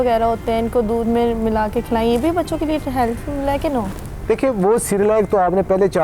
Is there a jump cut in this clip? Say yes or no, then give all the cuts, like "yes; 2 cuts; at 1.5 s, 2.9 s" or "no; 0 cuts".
no; 0 cuts